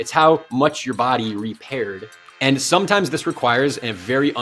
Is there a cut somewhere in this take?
yes; 1 cut; at 2.2 s

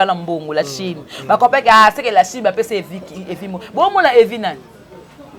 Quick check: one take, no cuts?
yes; 0 cuts

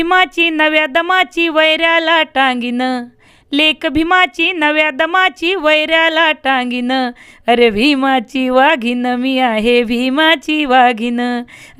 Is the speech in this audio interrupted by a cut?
no; 0 cuts

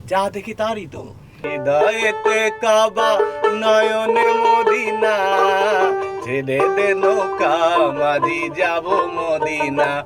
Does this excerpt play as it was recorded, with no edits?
no; 1 cut; at 1.4 s

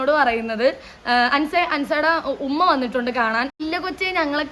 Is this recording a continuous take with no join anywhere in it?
no; 1 cut; at 3.6 s

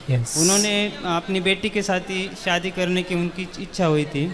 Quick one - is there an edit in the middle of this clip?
no; 0 cuts

